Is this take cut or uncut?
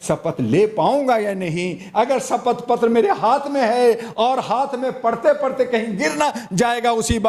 uncut